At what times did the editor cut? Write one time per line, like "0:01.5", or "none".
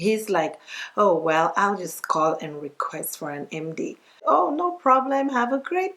0:04.2